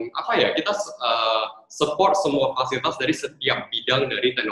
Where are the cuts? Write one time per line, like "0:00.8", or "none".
none